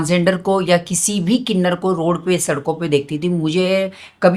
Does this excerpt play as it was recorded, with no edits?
yes; 0 cuts

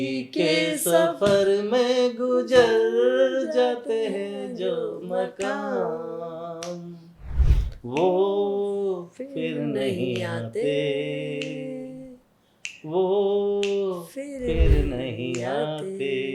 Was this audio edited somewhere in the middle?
no; 0 cuts

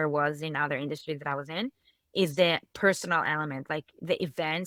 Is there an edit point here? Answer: no; 0 cuts

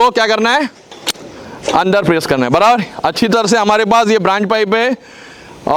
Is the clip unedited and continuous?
yes; 0 cuts

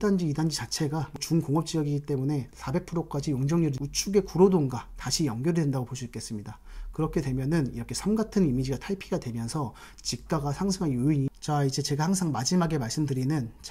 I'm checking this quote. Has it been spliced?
yes; 4 cuts; at 1.2 s, 2.5 s, 3.8 s, 11.4 s

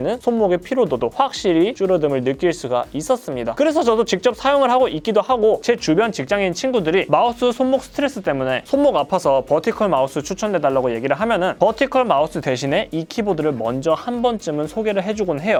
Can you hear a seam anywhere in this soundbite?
no; 0 cuts

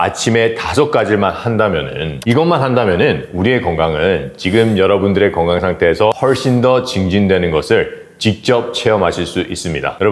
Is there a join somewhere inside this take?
yes; 2 cuts; at 2.2 s, 6.2 s

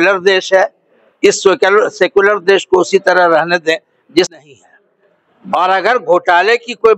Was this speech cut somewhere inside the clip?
yes; 1 cut; at 4.4 s

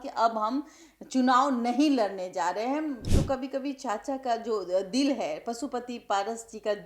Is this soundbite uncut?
no; 1 cut; at 3.1 s

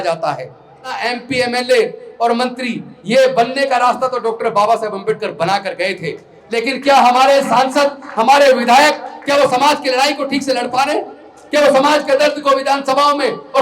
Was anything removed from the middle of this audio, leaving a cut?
yes; 1 cut; at 1.0 s

